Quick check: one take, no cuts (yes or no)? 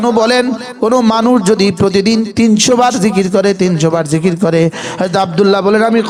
yes